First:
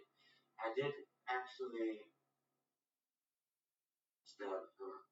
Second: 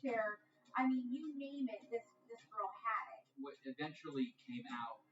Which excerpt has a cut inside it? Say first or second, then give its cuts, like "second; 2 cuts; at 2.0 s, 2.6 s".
second; 1 cut; at 3.2 s